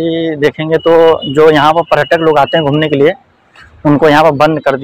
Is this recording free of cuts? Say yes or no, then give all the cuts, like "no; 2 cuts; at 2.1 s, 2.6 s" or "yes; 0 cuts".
yes; 0 cuts